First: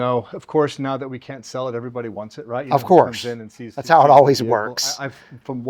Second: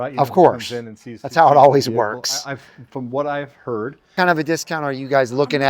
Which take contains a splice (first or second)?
second